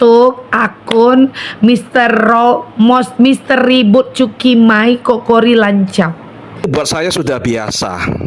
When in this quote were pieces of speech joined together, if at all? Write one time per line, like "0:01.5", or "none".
0:06.6